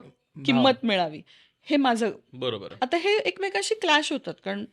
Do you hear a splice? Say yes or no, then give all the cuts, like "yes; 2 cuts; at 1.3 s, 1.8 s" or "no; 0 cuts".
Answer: yes; 1 cut; at 2.7 s